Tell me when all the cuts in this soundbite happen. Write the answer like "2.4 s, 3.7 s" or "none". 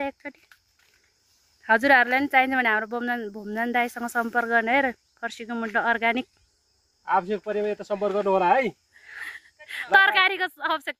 none